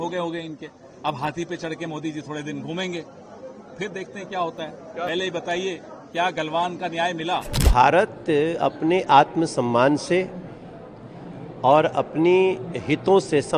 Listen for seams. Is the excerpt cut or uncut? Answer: cut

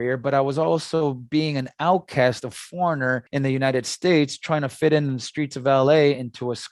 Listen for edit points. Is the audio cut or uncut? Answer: cut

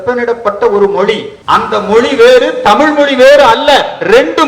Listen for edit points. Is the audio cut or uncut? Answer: cut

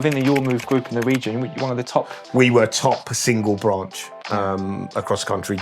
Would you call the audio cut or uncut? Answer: uncut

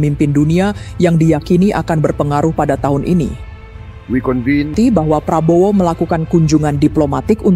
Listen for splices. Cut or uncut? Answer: cut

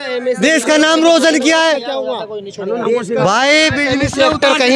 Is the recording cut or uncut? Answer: uncut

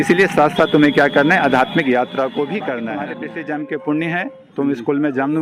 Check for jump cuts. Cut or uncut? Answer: cut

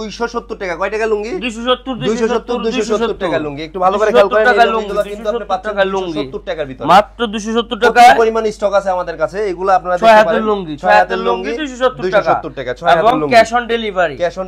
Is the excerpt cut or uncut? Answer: uncut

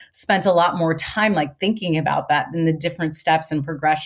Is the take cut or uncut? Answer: uncut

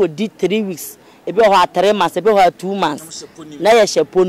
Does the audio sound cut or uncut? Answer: uncut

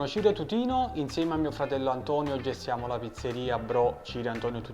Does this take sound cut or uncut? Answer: uncut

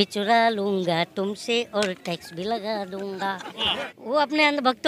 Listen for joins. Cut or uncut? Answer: cut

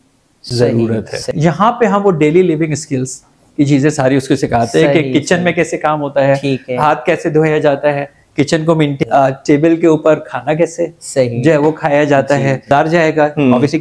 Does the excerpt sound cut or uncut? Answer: cut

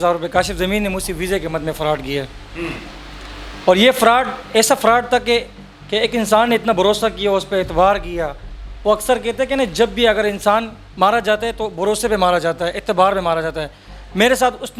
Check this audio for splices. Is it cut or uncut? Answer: uncut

